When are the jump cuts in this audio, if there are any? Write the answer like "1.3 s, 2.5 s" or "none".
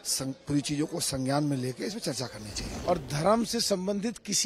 2.7 s